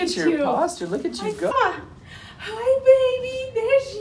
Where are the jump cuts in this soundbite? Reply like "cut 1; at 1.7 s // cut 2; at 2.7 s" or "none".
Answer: cut 1; at 1.5 s

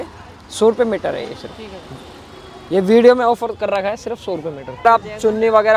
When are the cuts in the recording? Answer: cut 1; at 4.8 s

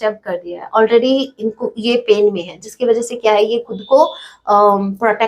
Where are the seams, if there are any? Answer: none

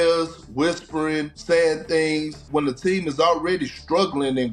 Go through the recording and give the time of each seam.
cut 1; at 2.4 s

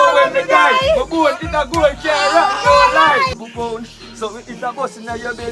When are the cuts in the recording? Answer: cut 1; at 3.3 s

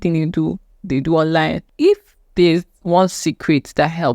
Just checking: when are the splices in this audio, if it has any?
cut 1; at 1.6 s

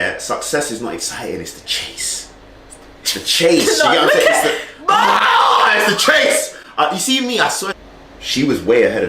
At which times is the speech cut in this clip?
cut 1; at 7.7 s

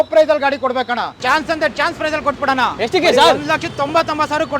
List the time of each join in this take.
cut 1; at 1.2 s

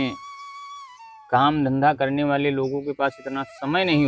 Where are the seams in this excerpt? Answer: none

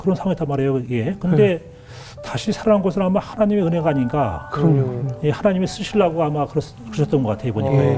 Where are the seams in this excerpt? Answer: none

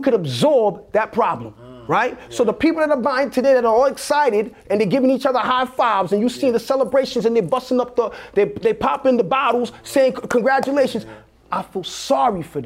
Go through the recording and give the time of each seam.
none

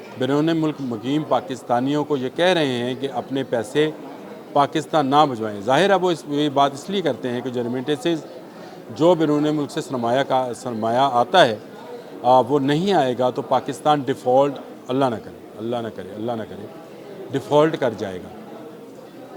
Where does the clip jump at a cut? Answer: none

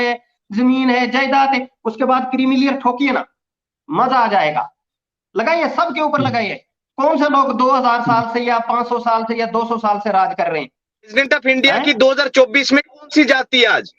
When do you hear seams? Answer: cut 1; at 11.1 s

